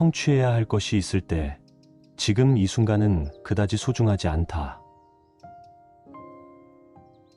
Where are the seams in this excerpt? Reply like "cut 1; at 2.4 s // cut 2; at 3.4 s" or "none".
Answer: none